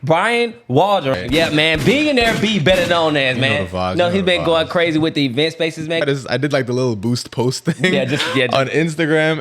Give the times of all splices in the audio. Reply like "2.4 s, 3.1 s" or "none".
1.1 s, 6.0 s